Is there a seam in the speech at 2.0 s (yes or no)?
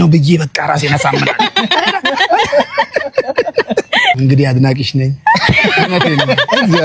no